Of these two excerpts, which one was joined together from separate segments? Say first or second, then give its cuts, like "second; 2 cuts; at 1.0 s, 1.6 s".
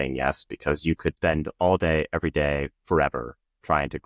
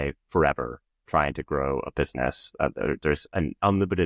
first; 1 cut; at 1.1 s